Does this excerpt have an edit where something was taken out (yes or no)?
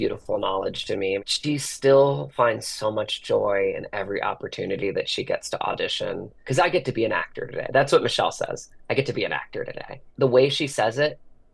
yes